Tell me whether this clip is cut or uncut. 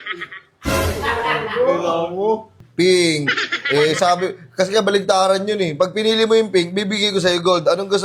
cut